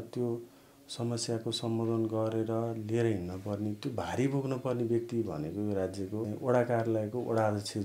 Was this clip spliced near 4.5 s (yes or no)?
no